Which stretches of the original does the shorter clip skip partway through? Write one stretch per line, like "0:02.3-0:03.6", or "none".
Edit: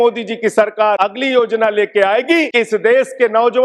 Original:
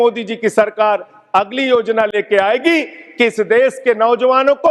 0:01.0-0:01.4
0:02.8-0:03.2